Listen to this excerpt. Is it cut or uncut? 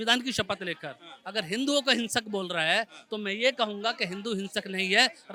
uncut